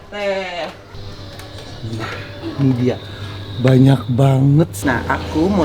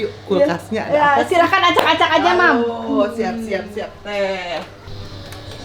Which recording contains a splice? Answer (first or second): first